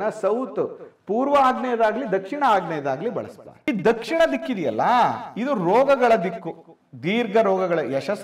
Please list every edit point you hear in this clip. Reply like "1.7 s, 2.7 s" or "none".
3.7 s